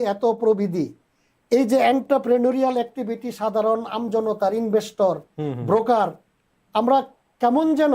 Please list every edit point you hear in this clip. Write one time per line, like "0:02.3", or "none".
none